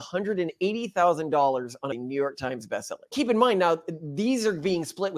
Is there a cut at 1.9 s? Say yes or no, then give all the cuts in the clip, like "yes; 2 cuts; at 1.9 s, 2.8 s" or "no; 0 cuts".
yes; 2 cuts; at 1.9 s, 3.0 s